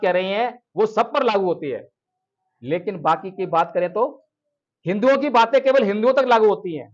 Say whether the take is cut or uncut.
uncut